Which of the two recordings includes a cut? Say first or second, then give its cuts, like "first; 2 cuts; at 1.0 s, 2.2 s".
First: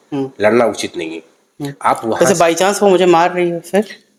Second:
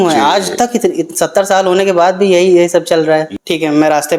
second; 1 cut; at 3.3 s